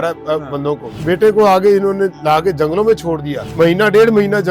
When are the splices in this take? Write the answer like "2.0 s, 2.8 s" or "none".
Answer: none